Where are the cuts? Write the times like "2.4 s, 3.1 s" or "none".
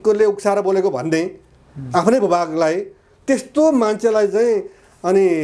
none